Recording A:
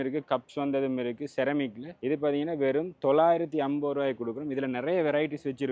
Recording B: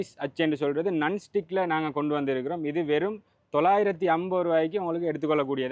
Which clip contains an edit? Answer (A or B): A